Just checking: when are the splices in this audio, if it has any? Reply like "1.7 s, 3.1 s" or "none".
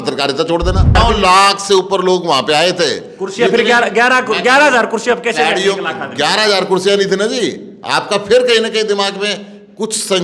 1.0 s